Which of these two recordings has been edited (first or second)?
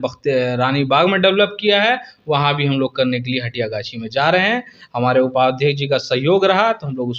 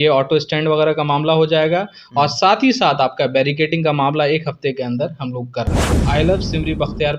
second